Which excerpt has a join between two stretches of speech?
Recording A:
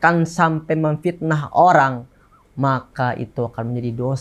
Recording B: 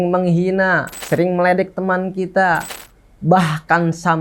B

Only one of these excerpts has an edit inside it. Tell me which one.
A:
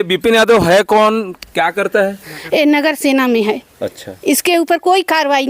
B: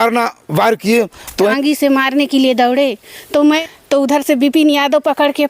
B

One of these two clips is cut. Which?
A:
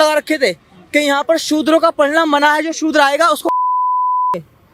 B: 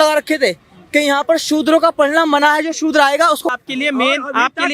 B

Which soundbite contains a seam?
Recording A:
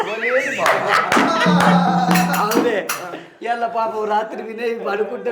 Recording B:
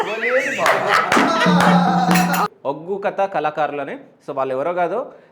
B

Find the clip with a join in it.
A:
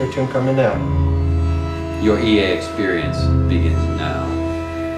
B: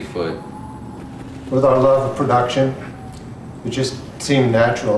B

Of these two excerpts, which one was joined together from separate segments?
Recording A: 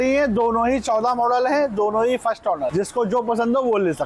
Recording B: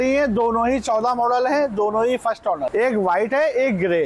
A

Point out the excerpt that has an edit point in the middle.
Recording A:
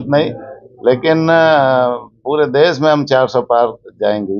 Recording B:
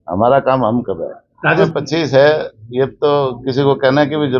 B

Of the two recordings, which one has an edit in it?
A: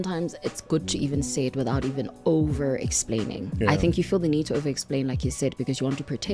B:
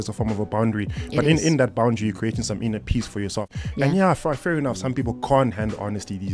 B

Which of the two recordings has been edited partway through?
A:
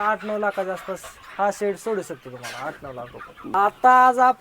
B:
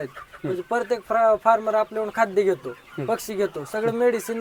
A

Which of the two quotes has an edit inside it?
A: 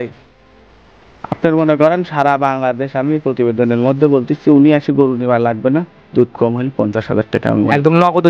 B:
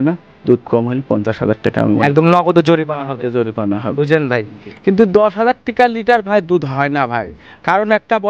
B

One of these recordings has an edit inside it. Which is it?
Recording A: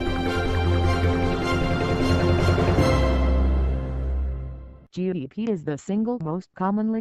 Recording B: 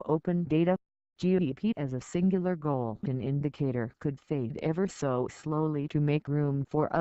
B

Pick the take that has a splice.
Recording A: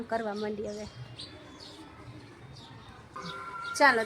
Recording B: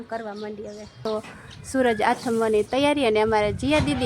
B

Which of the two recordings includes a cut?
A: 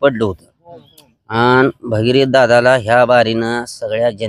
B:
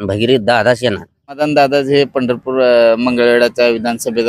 B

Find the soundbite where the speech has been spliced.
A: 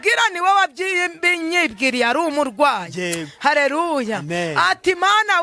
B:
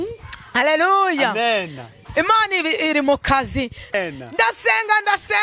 B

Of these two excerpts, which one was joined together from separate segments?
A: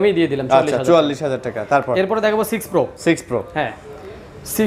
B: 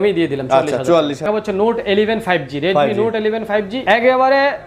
B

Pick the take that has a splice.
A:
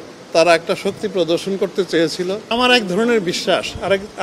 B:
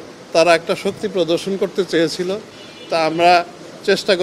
A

